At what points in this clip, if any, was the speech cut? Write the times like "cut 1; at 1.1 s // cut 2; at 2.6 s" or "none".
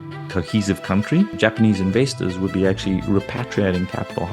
cut 1; at 1.3 s